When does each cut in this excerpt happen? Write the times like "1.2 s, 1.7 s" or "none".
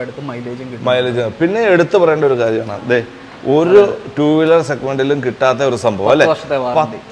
none